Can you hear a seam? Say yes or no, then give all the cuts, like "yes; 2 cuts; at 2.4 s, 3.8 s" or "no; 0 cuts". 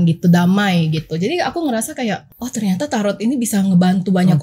yes; 1 cut; at 2.3 s